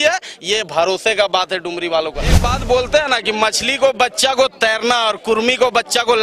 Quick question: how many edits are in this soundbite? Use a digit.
1